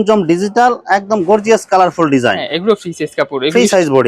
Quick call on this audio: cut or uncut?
uncut